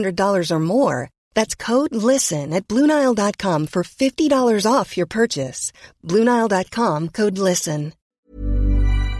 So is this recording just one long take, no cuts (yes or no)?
no